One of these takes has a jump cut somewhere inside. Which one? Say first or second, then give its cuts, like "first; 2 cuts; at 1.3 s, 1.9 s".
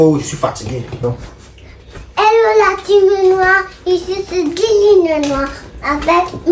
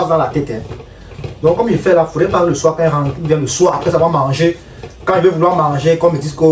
first; 1 cut; at 1.0 s